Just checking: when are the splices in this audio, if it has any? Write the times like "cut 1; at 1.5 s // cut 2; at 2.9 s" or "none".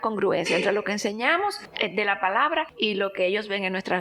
cut 1; at 1.7 s // cut 2; at 2.7 s